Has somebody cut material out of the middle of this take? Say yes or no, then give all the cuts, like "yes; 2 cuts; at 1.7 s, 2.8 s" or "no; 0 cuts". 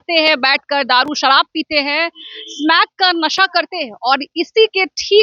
no; 0 cuts